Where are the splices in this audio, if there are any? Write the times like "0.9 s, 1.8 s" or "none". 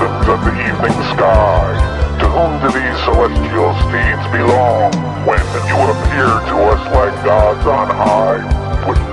none